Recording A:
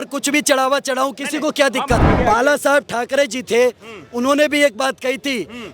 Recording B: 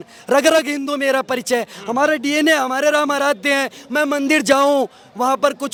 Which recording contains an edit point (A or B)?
A